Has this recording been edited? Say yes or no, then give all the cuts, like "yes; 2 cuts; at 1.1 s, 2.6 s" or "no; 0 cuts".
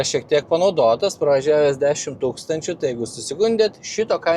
no; 0 cuts